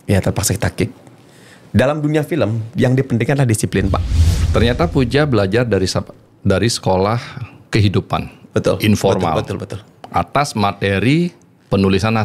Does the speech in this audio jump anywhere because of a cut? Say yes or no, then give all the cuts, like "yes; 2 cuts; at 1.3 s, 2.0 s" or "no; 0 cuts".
yes; 1 cut; at 4.4 s